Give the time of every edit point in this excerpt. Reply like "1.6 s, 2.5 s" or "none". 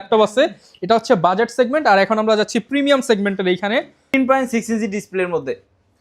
4.1 s